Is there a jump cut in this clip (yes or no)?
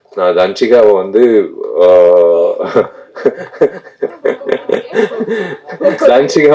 no